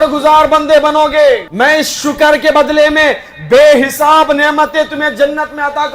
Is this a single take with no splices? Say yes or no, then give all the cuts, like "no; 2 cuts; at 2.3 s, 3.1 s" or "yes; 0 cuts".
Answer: no; 1 cut; at 1.5 s